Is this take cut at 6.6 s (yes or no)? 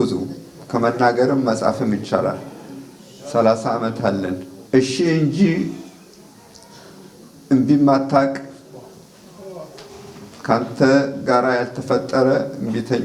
no